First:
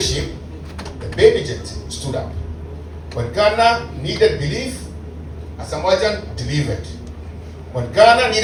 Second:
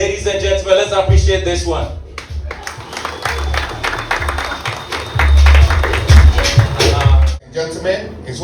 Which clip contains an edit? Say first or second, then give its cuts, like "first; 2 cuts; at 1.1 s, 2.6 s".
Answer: second; 1 cut; at 7.2 s